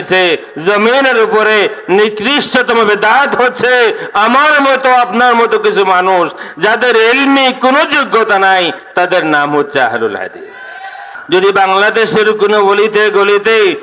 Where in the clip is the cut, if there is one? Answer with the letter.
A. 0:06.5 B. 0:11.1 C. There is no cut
B